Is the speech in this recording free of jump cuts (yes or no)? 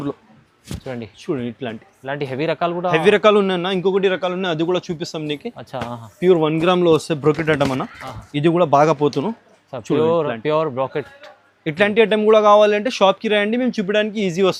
yes